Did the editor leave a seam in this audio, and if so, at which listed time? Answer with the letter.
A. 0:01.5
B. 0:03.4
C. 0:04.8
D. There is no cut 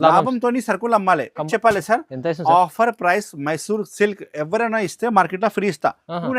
A